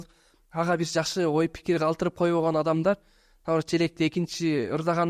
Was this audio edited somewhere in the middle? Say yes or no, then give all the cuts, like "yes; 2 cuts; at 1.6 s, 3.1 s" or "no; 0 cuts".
no; 0 cuts